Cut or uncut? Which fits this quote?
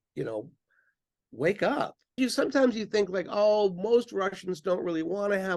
cut